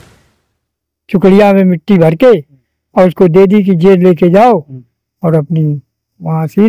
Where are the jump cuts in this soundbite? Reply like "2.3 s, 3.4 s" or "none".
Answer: none